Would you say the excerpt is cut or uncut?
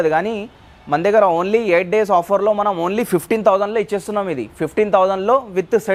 uncut